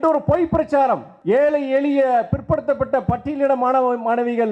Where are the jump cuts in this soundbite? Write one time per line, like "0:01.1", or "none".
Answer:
0:01.1